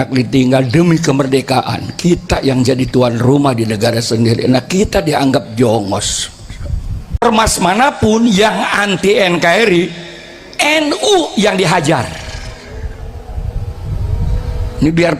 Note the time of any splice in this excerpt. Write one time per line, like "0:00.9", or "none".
0:07.2